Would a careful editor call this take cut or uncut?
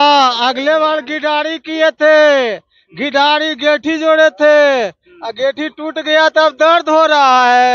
uncut